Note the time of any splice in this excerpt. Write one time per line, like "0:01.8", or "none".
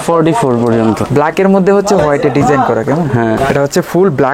0:01.1
0:03.4